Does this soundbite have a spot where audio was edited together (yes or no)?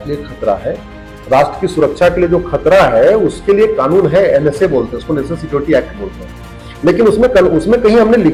no